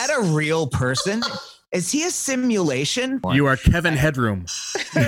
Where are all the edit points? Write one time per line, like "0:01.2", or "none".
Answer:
0:03.2